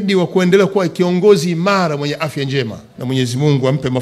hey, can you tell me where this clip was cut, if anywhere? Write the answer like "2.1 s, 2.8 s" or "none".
2.9 s

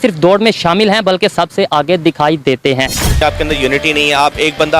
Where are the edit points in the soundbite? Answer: 3.1 s

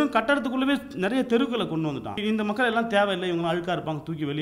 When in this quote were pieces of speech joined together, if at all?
2.2 s

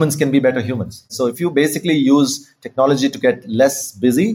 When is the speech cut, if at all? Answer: 1.1 s

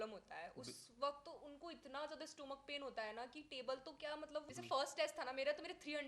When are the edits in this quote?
4.5 s

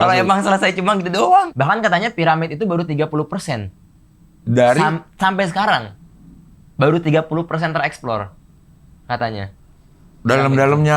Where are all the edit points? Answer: 1.4 s

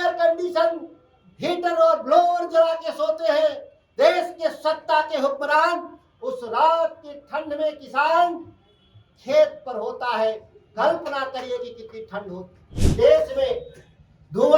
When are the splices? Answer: 12.8 s

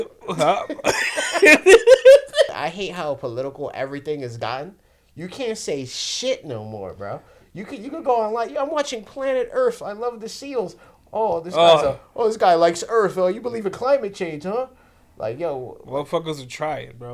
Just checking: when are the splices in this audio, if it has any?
2.6 s

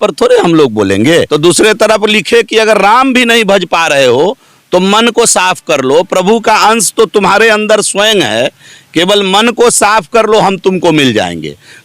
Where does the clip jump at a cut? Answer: 1.3 s

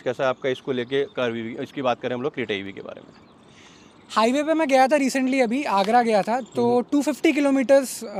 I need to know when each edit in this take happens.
none

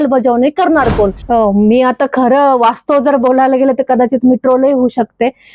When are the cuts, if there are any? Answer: 1.2 s

